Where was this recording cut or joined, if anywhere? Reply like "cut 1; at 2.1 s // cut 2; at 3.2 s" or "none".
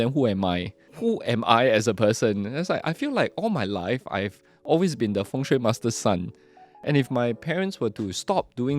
cut 1; at 1.1 s